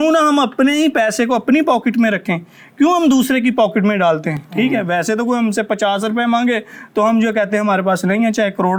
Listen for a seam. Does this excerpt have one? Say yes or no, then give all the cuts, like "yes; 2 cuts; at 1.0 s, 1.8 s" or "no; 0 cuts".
no; 0 cuts